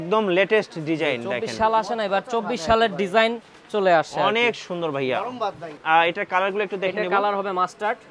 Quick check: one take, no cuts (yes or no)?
no